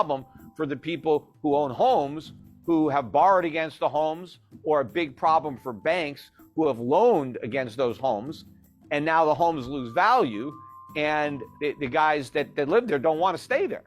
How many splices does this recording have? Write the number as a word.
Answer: one